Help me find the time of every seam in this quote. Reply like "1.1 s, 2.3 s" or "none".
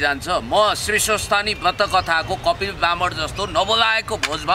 none